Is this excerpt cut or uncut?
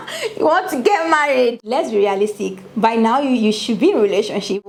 uncut